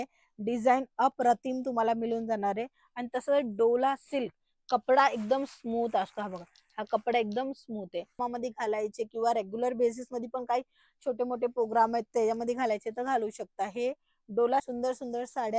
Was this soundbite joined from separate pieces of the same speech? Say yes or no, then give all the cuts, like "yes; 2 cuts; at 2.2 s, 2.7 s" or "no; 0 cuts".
yes; 2 cuts; at 8.2 s, 14.7 s